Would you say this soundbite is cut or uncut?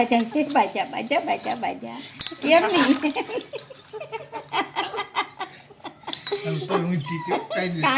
uncut